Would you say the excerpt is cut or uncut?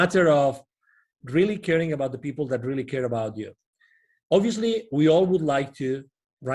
uncut